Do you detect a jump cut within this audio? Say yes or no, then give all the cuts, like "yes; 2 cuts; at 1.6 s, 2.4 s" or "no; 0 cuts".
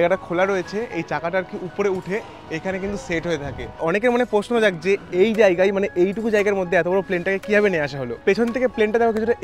yes; 2 cuts; at 3.8 s, 8.2 s